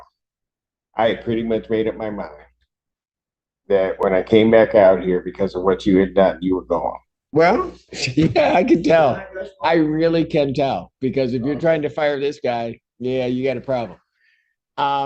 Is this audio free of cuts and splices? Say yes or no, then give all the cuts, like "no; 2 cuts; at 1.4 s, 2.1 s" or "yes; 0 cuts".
no; 1 cut; at 7.1 s